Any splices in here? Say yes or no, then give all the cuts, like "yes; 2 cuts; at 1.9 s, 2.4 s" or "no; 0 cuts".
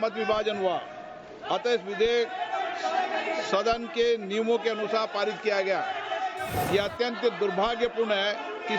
yes; 1 cut; at 6.5 s